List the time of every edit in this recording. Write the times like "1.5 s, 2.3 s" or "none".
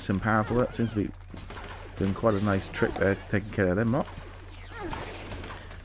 none